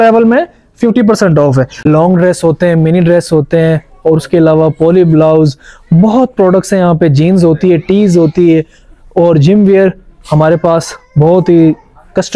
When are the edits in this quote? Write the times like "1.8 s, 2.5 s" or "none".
1.9 s